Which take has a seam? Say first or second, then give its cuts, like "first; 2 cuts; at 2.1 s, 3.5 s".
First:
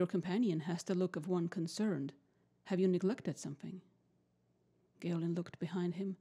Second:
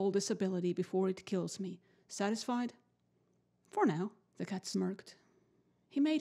second; 1 cut; at 4.8 s